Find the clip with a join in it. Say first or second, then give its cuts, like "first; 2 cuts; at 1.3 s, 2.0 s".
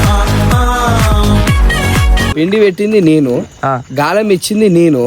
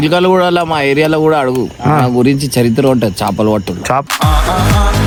first; 1 cut; at 2.2 s